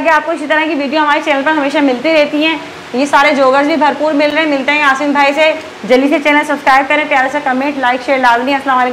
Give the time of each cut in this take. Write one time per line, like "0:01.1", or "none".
none